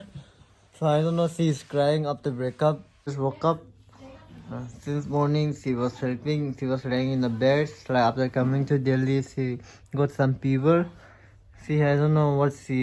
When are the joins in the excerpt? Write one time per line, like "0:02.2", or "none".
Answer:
0:03.1